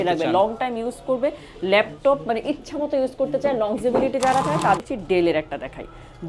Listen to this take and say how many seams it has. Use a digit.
1